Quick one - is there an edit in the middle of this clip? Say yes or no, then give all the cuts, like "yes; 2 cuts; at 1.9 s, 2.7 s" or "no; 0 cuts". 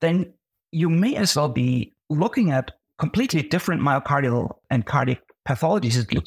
yes; 3 cuts; at 2.0 s, 2.8 s, 4.6 s